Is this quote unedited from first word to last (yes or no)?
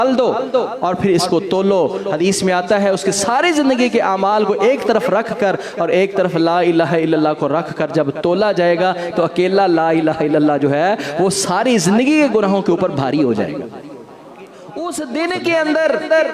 no